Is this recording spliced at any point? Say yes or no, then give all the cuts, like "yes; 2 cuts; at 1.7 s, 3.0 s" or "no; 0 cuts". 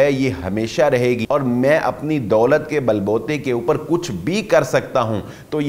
no; 0 cuts